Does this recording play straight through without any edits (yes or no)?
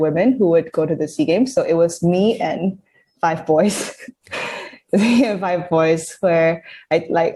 yes